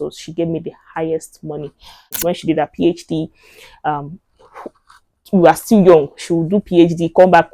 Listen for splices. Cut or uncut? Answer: cut